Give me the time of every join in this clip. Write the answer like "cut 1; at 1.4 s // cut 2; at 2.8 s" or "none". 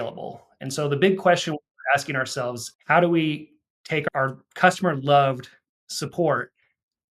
cut 1; at 2.6 s // cut 2; at 4.0 s